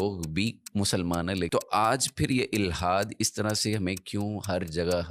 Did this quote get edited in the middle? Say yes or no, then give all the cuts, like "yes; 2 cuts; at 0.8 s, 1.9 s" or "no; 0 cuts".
yes; 1 cut; at 1.5 s